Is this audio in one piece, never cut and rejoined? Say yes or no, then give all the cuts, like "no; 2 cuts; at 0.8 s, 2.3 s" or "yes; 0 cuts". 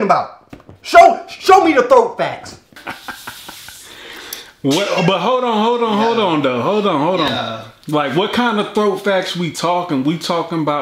no; 1 cut; at 2.8 s